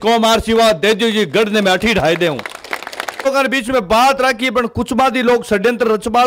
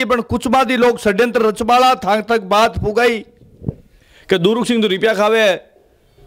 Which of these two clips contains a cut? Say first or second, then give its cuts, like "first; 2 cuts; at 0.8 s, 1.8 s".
first; 1 cut; at 3.3 s